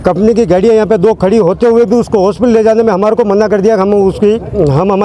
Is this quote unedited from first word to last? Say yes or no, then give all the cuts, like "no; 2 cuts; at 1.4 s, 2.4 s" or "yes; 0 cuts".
yes; 0 cuts